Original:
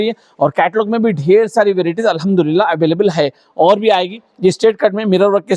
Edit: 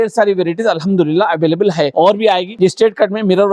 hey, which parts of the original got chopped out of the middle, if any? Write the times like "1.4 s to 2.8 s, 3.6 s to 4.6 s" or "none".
3.6 s to 4.0 s